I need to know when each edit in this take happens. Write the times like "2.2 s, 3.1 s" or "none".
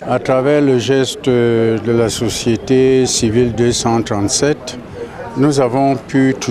none

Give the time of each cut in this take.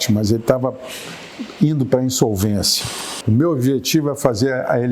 2.8 s

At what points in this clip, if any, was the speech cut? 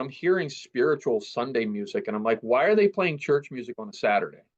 none

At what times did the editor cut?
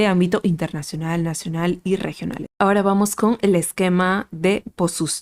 2.5 s

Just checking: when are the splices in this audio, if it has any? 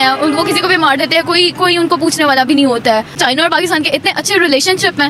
none

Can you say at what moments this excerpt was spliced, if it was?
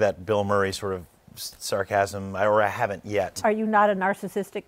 3.3 s

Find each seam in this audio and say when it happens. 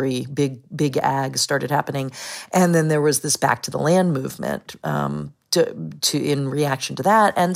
none

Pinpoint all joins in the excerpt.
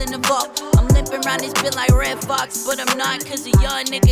none

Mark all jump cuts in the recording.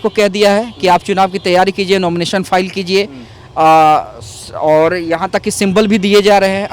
none

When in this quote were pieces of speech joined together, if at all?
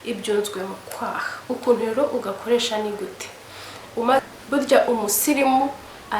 4.2 s

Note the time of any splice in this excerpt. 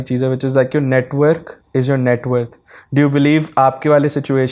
none

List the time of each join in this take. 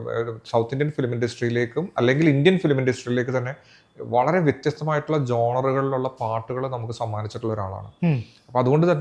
none

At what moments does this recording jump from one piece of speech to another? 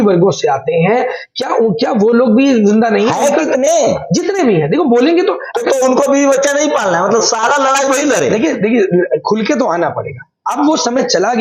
none

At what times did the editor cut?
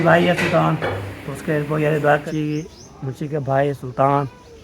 2.2 s

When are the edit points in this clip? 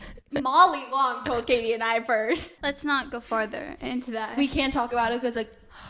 2.5 s

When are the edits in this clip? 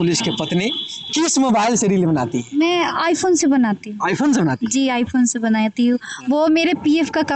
none

